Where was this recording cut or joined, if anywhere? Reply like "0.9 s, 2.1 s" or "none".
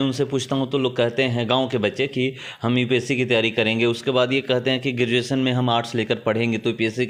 none